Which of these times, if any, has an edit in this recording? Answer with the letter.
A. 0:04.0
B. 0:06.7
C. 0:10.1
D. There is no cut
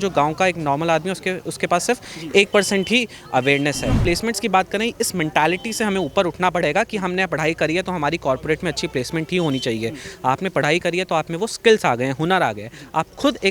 A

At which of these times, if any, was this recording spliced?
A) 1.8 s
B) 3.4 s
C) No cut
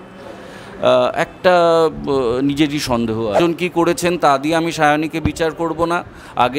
B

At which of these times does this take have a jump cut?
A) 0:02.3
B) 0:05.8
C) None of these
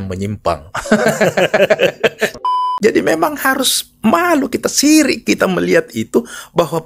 A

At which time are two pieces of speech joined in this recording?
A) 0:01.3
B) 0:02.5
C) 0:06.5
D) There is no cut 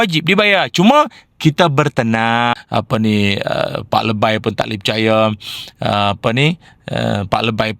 B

